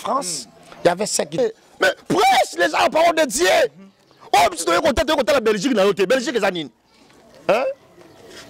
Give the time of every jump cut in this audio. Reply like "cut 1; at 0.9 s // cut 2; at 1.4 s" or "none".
cut 1; at 1.4 s